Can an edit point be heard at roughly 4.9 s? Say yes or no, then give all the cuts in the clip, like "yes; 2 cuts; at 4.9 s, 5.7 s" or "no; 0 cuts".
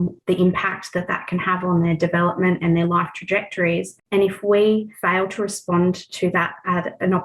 yes; 2 cuts; at 4.0 s, 4.9 s